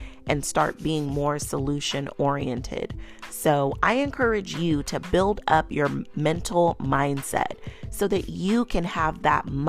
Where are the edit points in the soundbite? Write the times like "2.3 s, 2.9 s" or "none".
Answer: none

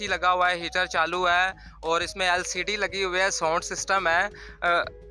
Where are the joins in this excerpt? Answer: none

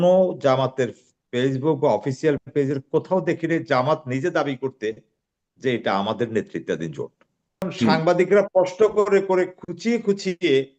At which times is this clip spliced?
7.6 s

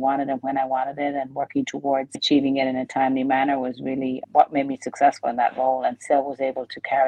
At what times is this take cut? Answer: 2.2 s

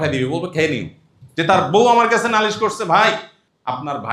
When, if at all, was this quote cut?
1.5 s

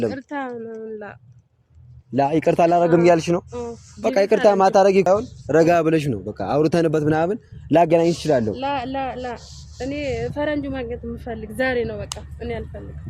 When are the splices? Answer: 5.1 s

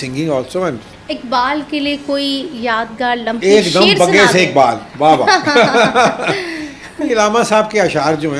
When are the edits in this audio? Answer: 0.9 s, 3.4 s

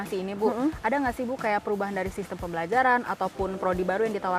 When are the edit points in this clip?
none

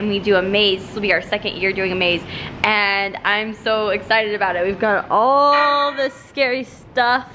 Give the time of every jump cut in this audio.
none

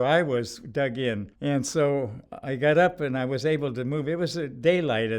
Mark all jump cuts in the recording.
1.3 s

